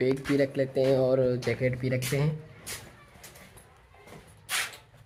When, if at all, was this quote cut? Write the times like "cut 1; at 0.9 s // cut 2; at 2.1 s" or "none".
none